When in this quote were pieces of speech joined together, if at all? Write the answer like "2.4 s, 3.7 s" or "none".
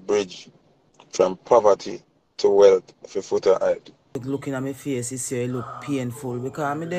4.1 s